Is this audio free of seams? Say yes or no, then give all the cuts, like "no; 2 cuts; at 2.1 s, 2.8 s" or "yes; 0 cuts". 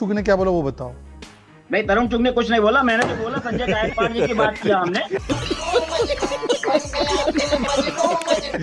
yes; 0 cuts